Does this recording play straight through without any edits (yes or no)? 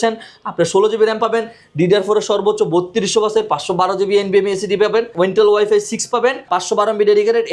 no